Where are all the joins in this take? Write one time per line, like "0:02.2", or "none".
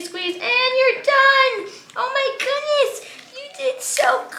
none